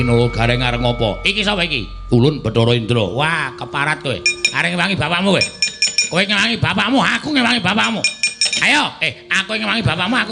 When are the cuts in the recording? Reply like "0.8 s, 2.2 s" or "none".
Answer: 2.3 s